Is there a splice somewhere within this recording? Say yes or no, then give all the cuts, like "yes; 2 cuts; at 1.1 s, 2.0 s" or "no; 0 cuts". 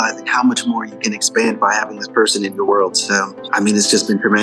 yes; 1 cut; at 3.4 s